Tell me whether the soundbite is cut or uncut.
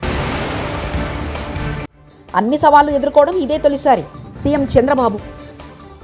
uncut